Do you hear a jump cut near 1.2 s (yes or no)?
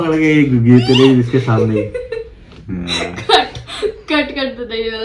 no